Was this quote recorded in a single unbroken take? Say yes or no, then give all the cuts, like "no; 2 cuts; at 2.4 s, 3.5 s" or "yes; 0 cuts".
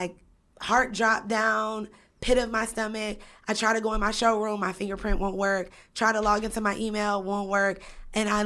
yes; 0 cuts